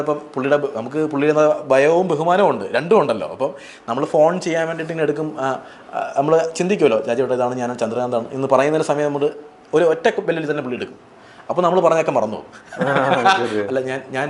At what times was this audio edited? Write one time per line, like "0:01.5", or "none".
none